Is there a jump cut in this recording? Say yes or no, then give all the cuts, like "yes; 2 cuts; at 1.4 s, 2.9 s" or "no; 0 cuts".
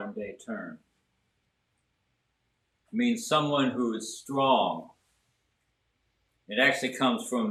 no; 0 cuts